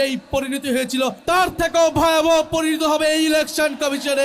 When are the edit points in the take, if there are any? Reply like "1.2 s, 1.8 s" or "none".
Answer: 1.2 s